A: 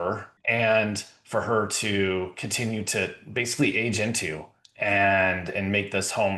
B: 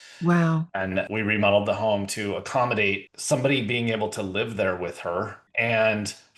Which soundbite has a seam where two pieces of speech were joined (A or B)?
B